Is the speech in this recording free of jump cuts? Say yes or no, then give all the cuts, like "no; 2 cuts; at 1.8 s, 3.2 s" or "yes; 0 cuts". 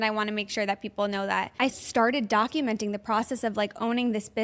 no; 1 cut; at 1.7 s